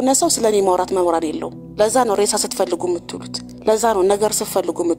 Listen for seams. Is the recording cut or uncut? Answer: cut